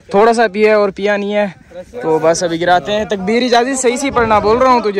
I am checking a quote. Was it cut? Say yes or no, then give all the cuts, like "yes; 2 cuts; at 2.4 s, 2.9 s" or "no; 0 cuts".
no; 0 cuts